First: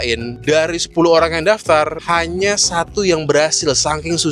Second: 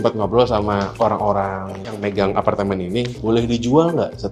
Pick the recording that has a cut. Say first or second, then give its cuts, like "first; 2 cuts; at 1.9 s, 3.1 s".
second; 2 cuts; at 0.9 s, 2.0 s